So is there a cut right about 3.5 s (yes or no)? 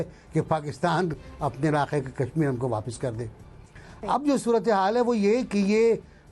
no